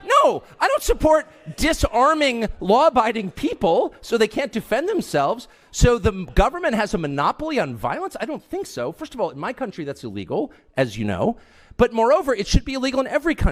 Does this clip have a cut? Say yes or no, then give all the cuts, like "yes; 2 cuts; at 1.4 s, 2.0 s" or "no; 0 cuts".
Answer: no; 0 cuts